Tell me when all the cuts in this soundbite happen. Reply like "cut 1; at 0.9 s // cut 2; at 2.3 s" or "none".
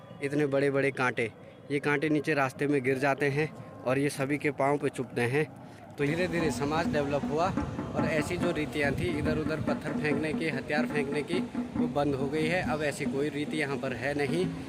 cut 1; at 6.1 s